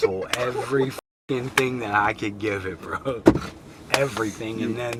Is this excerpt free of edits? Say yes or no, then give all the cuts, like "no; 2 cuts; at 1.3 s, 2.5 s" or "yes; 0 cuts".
yes; 0 cuts